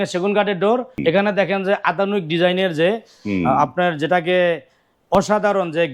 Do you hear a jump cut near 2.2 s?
no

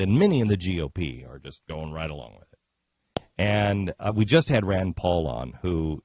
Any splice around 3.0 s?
no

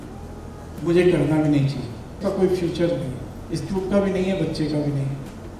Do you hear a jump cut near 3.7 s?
no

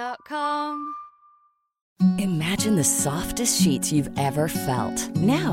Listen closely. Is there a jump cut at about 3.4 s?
no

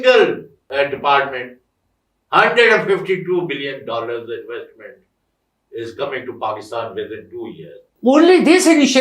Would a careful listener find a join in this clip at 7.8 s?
yes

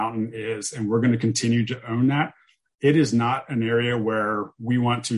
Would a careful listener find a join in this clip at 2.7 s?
no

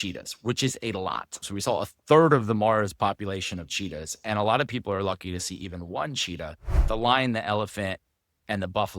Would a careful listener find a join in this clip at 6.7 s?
yes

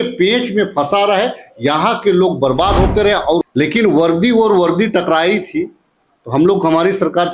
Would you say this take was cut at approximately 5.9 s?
no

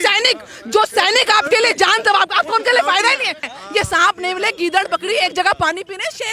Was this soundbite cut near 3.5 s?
yes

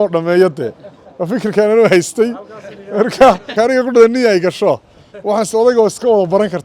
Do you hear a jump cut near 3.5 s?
yes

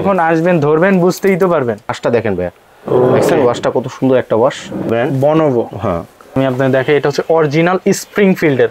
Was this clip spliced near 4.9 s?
yes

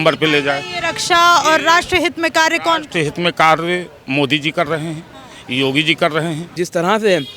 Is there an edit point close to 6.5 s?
yes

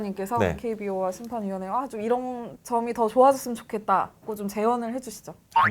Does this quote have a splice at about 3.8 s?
no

